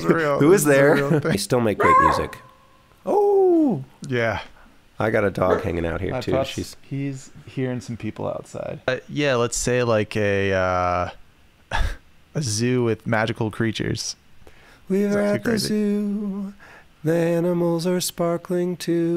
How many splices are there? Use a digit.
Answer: 2